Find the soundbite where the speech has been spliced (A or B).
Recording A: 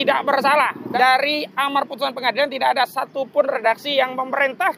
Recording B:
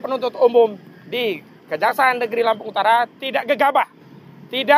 A